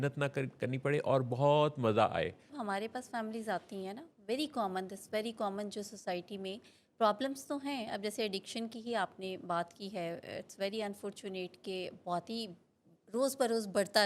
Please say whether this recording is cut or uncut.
cut